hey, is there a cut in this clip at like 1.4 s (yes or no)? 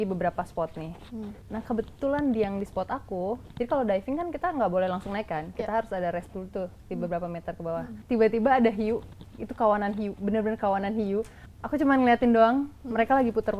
yes